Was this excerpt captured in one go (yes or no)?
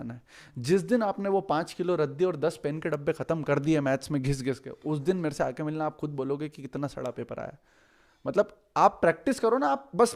yes